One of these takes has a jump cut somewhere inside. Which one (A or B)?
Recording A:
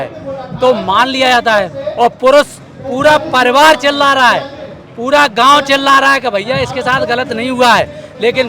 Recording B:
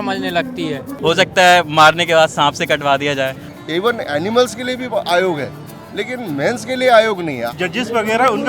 B